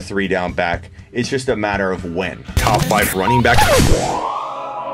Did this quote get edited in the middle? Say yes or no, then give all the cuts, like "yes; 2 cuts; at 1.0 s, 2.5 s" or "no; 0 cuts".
yes; 1 cut; at 2.4 s